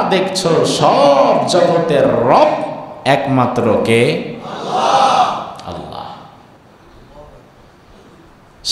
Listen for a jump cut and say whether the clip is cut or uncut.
uncut